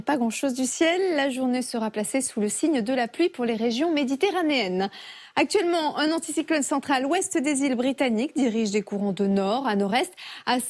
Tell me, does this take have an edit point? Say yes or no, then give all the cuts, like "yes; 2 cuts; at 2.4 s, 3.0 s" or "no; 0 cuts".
yes; 1 cut; at 8.3 s